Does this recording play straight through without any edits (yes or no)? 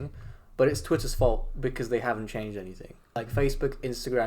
no